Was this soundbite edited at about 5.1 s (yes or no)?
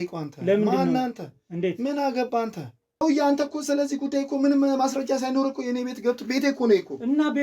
no